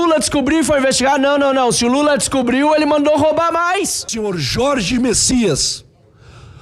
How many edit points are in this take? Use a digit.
1